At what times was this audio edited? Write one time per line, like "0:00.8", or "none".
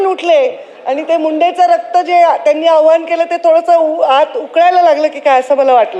none